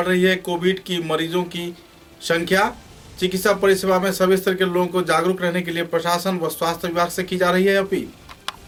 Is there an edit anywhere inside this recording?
no; 0 cuts

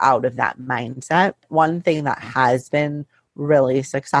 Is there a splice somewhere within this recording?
yes; 1 cut; at 1.4 s

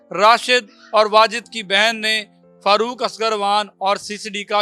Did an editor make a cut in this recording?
no; 0 cuts

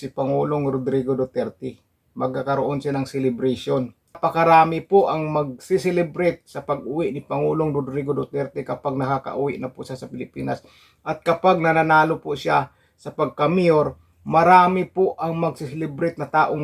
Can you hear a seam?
yes; 1 cut; at 4.2 s

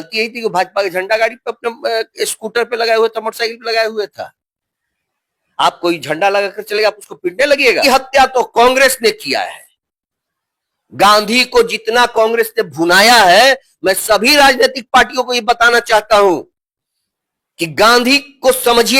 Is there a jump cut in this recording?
yes; 1 cut; at 7.8 s

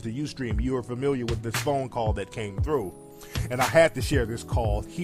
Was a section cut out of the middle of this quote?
yes; 1 cut; at 3.4 s

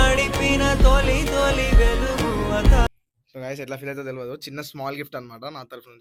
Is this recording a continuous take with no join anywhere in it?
yes; 0 cuts

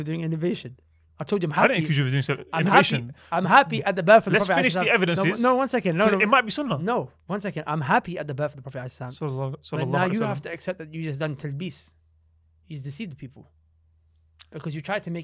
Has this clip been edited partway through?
no; 0 cuts

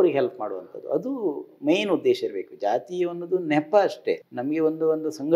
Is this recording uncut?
no; 1 cut; at 4.3 s

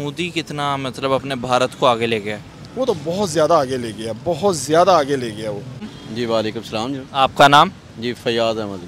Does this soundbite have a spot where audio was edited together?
no; 0 cuts

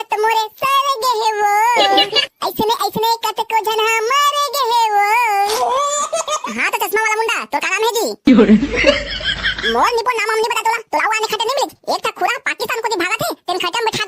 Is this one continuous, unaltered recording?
no; 1 cut; at 6.4 s

